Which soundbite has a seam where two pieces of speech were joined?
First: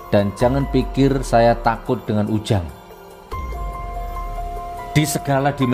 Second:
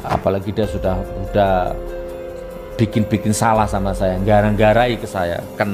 first; 2 cuts; at 2.6 s, 4.5 s

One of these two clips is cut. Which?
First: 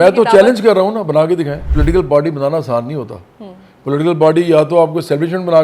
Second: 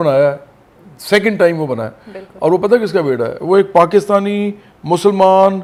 first; 1 cut; at 1.6 s

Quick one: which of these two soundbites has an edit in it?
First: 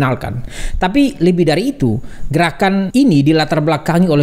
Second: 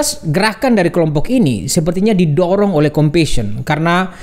first; 1 cut; at 2.9 s

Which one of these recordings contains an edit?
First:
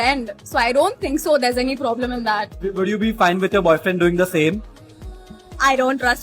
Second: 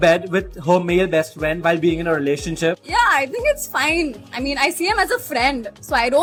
first; 1 cut; at 2.9 s

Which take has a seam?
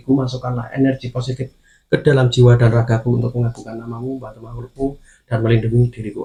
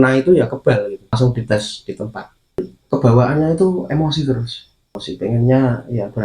second; 3 cuts; at 1.2 s, 2.7 s, 5.0 s

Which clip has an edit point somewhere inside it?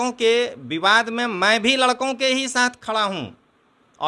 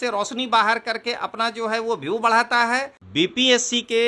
second; 1 cut; at 3.0 s

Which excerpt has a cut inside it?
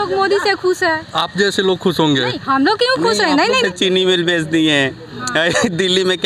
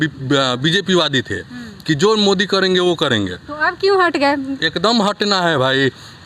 first; 1 cut; at 3.6 s

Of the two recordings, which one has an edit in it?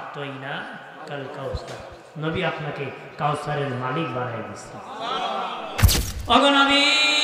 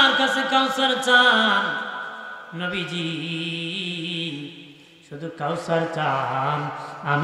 first; 1 cut; at 5.9 s

